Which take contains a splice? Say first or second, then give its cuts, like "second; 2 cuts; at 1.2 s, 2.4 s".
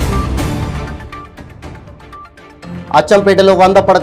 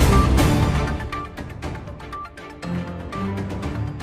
first; 1 cut; at 2.9 s